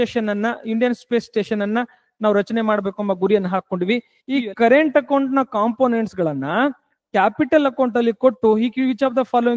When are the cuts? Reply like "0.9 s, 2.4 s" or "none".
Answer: 4.1 s

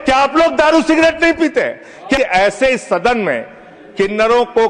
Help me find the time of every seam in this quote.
2.2 s

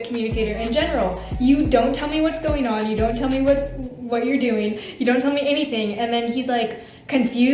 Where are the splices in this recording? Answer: none

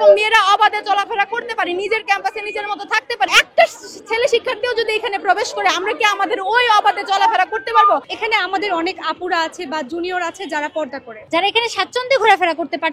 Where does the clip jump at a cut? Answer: 3.3 s, 8.1 s, 11.1 s

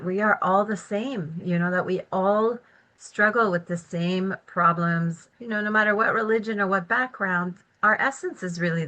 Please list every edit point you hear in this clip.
5.3 s

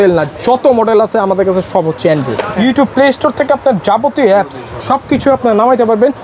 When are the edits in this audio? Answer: 2.4 s

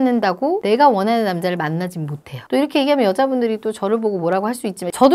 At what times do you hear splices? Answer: none

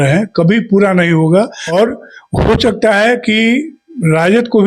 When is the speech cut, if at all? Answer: 1.6 s

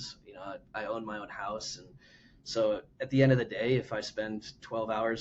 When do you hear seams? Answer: none

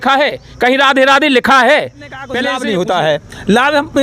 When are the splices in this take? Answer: 2.4 s

